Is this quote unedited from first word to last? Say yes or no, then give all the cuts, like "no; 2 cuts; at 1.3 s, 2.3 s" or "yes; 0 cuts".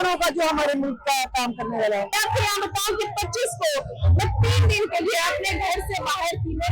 no; 1 cut; at 2.2 s